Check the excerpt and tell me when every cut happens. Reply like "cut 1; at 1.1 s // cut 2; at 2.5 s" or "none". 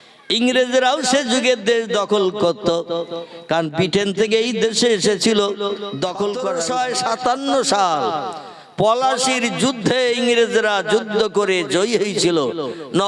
cut 1; at 6.5 s